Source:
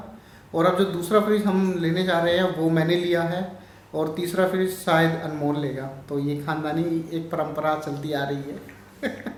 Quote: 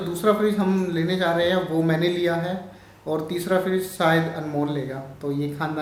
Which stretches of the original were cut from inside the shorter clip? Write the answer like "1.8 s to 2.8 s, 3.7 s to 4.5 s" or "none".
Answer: none